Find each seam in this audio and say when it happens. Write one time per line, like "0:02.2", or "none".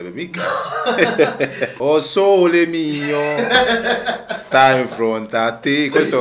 0:01.7

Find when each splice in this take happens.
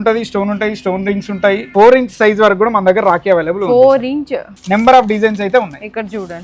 0:01.6
0:04.6

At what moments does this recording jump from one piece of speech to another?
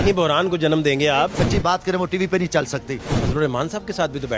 0:01.3
0:03.1

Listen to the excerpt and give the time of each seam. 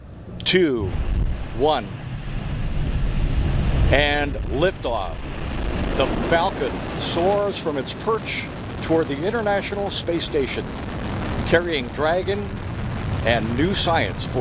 none

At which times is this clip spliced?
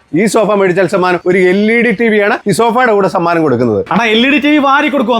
0:01.2
0:02.4
0:03.8

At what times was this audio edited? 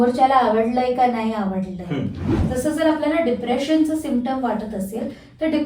0:02.3

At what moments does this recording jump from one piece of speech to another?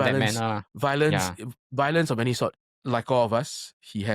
0:02.7

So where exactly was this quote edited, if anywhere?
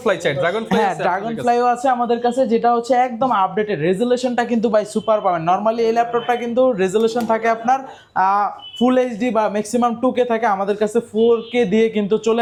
none

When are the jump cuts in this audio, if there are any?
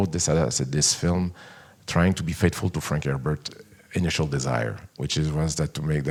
none

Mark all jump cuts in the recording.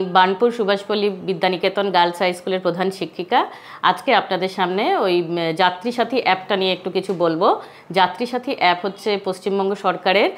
none

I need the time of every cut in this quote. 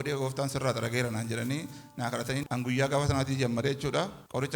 0:02.4

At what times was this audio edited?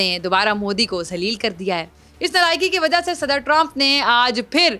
0:02.0

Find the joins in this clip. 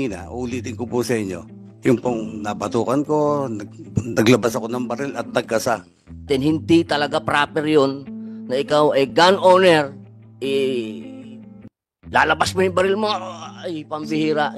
0:06.2

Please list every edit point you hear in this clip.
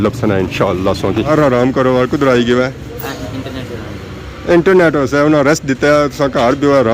0:01.3

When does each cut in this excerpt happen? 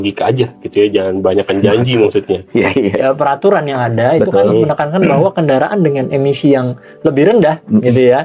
0:03.0

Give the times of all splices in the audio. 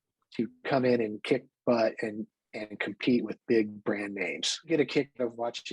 0:04.7

